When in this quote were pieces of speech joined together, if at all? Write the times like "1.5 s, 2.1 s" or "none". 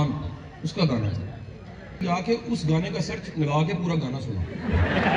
2.0 s